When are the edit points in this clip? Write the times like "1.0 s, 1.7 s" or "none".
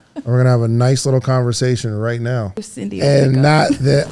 2.6 s